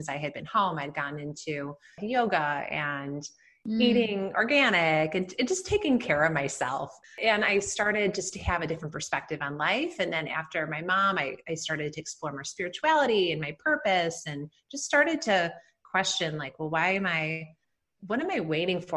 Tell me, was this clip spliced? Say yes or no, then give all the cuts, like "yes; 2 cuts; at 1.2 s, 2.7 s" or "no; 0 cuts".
yes; 2 cuts; at 2.0 s, 7.1 s